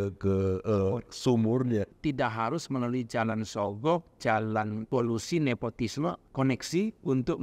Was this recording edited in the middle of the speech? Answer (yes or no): yes